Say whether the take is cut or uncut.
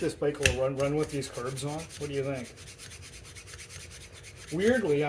uncut